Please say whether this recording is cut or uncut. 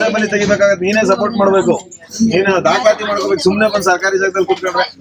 uncut